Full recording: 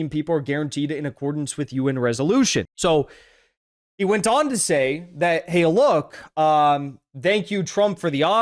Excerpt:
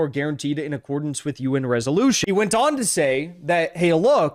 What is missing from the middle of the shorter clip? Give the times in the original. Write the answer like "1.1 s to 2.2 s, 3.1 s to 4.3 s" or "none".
2.5 s to 3.9 s